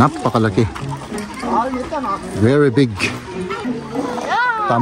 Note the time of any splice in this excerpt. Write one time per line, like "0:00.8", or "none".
0:03.7